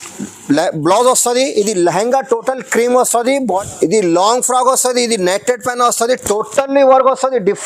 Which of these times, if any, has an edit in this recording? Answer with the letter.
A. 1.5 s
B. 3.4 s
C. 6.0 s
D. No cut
B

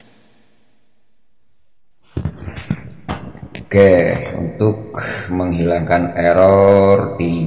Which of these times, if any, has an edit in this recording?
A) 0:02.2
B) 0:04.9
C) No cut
A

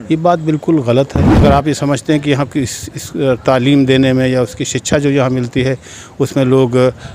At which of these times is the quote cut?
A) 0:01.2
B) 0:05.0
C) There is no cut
A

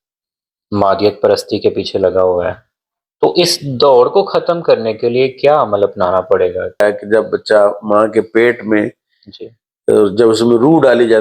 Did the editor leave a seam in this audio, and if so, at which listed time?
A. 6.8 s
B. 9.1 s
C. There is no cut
A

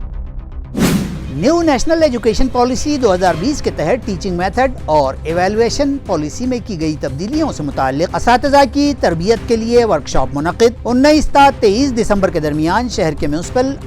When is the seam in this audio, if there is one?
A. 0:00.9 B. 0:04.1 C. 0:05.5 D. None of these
A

